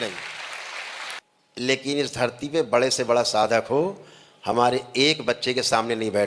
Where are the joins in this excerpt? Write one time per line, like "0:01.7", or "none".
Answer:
0:01.2